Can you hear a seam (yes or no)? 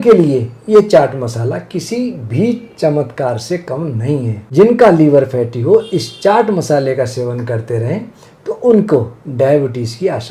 yes